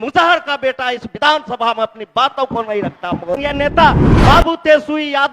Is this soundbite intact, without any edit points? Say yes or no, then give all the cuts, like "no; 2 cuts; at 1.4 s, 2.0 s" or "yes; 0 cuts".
no; 1 cut; at 3.4 s